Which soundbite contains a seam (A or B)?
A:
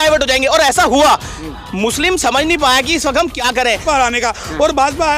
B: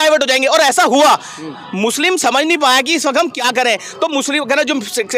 A